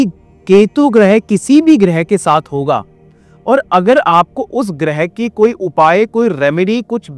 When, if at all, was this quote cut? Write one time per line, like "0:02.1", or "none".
none